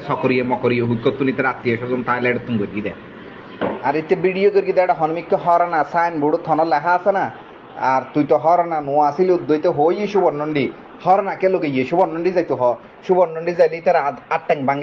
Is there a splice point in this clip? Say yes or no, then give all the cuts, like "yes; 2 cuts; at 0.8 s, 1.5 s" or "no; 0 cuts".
no; 0 cuts